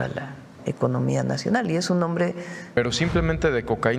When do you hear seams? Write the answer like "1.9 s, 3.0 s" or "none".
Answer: 2.6 s